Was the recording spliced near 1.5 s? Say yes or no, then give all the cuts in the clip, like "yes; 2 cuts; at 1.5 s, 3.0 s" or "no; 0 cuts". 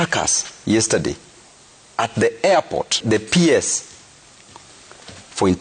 no; 1 cut; at 3.0 s